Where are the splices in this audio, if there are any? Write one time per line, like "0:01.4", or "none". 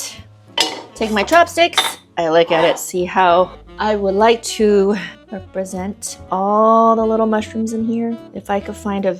none